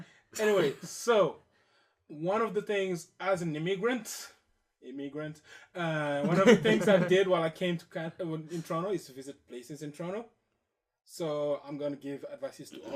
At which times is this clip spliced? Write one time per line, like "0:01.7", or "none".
0:08.9